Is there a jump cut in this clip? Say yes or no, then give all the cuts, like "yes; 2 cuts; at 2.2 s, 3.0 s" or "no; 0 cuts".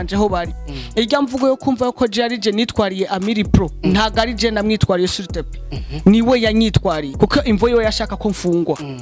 yes; 1 cut; at 7.1 s